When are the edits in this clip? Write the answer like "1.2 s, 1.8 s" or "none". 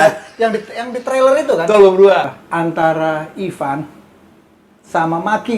2.3 s